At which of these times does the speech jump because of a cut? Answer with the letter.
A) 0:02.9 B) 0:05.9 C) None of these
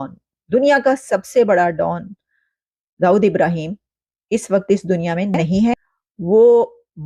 C